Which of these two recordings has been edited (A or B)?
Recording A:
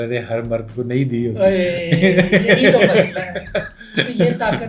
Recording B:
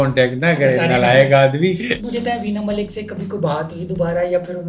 B